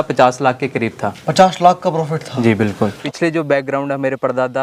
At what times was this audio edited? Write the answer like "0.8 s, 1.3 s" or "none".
3.0 s